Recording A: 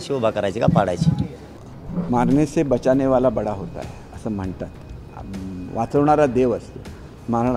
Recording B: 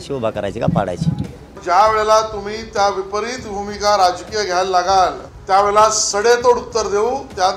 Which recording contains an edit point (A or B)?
B